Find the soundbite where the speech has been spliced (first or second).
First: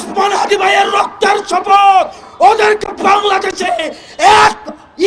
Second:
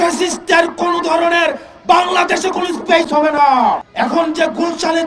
second